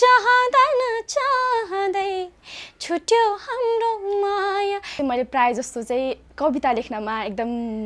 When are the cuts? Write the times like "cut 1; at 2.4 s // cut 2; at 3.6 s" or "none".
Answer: cut 1; at 4.9 s